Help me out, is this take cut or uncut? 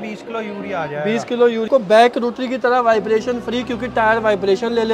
cut